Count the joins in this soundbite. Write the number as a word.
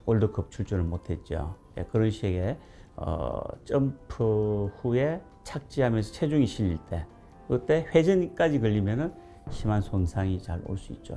zero